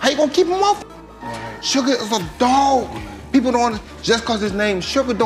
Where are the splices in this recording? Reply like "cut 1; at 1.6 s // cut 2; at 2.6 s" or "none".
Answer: none